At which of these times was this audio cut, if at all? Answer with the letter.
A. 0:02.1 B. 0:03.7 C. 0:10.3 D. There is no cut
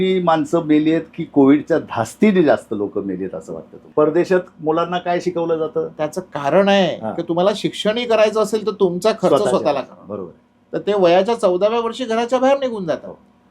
B